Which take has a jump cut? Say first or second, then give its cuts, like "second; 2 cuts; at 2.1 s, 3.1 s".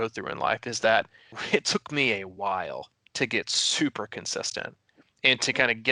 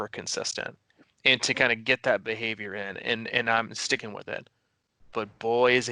first; 1 cut; at 1.3 s